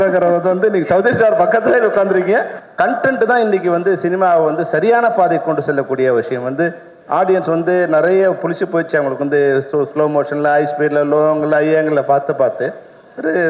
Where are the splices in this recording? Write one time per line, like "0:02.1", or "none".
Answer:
0:02.6